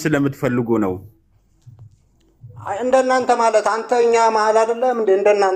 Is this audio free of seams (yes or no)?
yes